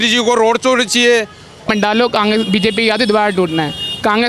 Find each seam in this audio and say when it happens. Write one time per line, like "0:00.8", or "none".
0:01.7